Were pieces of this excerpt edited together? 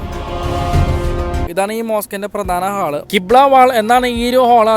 yes; 1 cut; at 1.5 s

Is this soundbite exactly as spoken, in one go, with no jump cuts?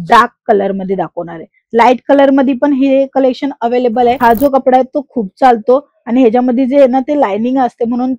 no; 1 cut; at 4.2 s

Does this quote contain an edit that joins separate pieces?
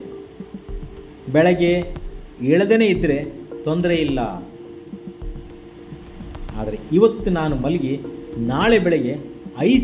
no; 0 cuts

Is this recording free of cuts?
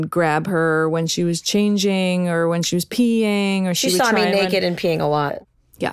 yes; 0 cuts

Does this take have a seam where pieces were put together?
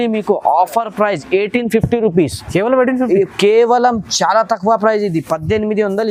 no; 0 cuts

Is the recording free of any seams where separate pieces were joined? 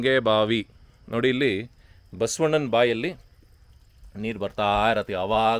yes; 0 cuts

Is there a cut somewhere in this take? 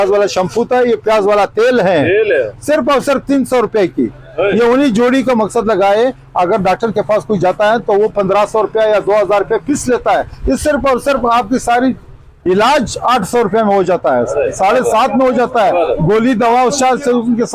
no; 0 cuts

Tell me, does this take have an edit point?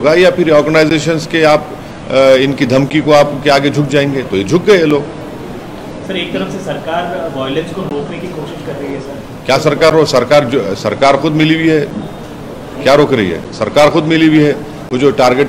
no; 0 cuts

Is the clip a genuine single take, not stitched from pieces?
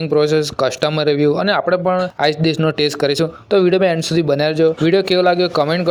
yes; 0 cuts

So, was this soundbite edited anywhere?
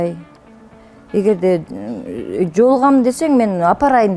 no; 0 cuts

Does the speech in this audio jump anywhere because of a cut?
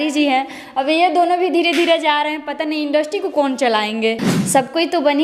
yes; 1 cut; at 4.3 s

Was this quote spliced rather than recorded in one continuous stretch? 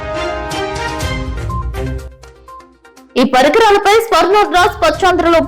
yes; 1 cut; at 1.6 s

